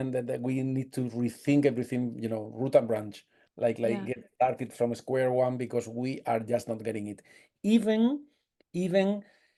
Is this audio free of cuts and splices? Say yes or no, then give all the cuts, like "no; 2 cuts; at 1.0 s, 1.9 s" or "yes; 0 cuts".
yes; 0 cuts